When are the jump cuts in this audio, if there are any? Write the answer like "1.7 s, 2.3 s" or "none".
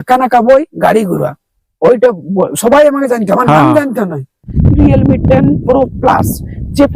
4.5 s